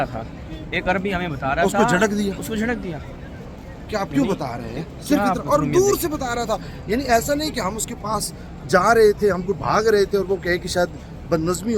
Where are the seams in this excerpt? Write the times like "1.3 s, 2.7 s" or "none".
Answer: none